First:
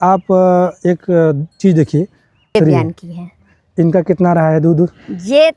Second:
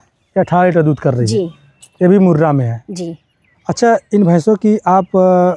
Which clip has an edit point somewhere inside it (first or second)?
first